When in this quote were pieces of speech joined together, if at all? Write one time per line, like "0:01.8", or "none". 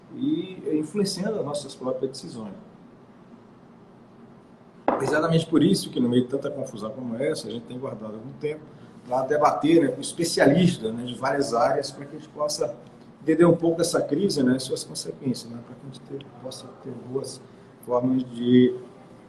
0:08.2